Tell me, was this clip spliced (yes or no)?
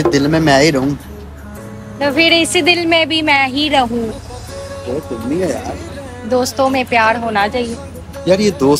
yes